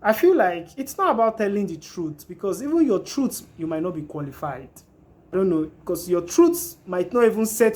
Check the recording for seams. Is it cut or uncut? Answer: cut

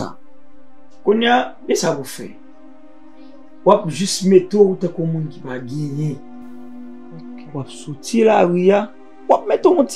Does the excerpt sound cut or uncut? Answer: uncut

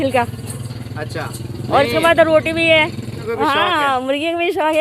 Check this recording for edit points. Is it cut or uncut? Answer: cut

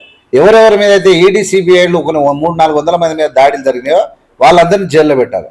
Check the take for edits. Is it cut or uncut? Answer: uncut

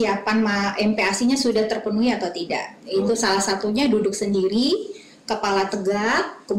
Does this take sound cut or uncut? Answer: uncut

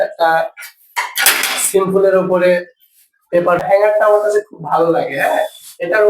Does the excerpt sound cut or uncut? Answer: cut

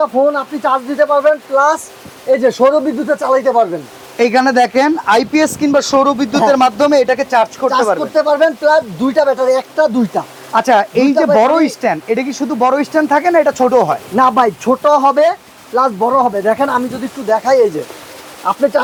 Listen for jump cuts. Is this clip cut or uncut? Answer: uncut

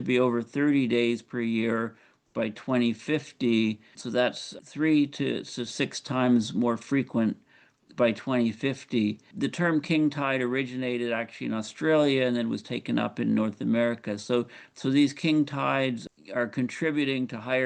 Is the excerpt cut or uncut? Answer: uncut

